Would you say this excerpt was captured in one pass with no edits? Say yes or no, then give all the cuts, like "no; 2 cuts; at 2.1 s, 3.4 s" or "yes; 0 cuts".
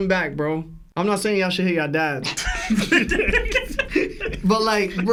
yes; 0 cuts